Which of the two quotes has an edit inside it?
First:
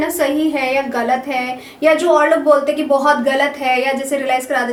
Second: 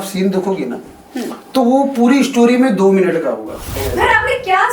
second; 1 cut; at 3.8 s

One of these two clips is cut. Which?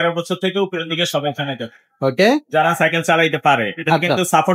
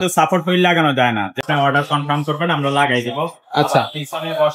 second; 1 cut; at 1.4 s

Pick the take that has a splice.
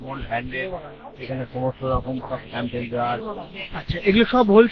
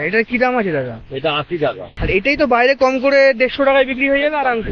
second; 1 cut; at 1.9 s

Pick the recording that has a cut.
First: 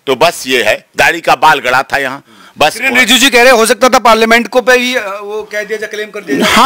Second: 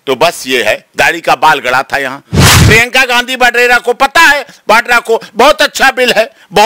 second; 1 cut; at 2.5 s

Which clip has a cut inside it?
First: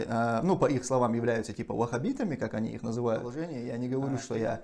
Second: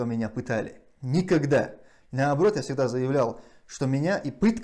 first; 1 cut; at 3.4 s

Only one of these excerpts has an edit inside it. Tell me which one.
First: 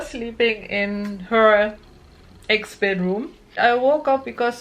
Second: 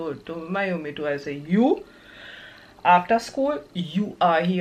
first; 1 cut; at 3.6 s

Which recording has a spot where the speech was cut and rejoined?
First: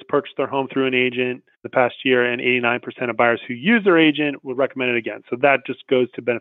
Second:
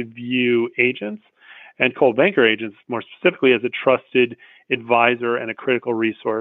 first; 1 cut; at 1.6 s

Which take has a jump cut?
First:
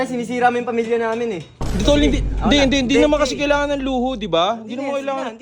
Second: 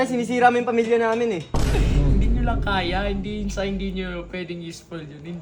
first; 1 cut; at 1.5 s

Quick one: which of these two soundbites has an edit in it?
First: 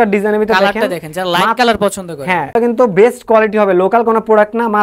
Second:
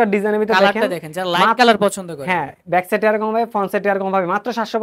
first; 1 cut; at 2.5 s

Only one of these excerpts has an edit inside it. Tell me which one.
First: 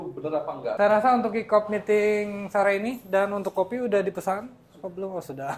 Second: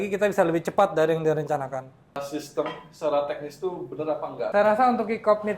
second; 1 cut; at 2.2 s

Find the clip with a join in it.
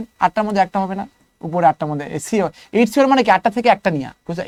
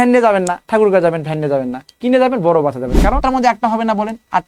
second; 1 cut; at 3.2 s

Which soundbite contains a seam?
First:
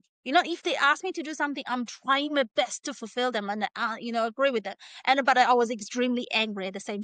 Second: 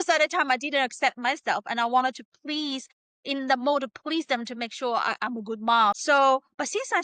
second; 1 cut; at 6.0 s

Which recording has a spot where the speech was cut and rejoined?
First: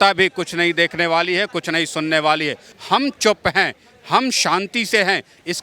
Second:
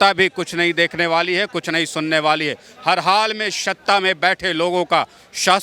first; 1 cut; at 2.7 s

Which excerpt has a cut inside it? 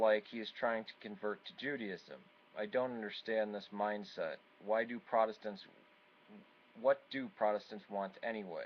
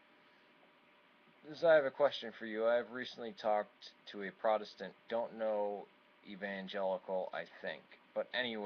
first; 1 cut; at 3.1 s

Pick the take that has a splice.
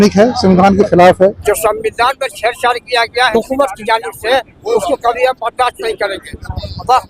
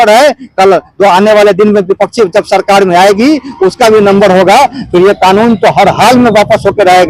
first; 2 cuts; at 1.5 s, 3.3 s

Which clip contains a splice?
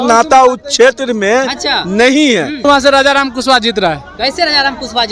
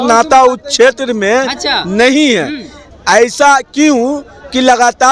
first; 1 cut; at 2.6 s

